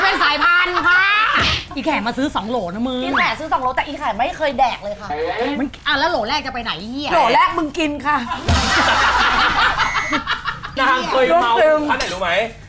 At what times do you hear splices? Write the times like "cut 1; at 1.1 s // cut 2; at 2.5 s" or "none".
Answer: cut 1; at 1.5 s // cut 2; at 10.7 s